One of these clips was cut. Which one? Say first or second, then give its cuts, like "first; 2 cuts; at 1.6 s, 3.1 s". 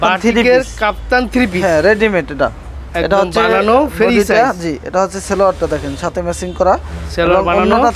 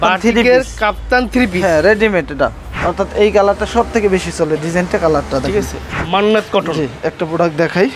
second; 2 cuts; at 2.7 s, 5.8 s